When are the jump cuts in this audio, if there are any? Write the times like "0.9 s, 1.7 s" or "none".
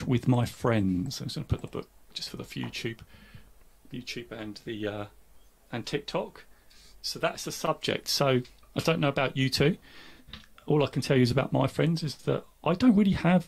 8.6 s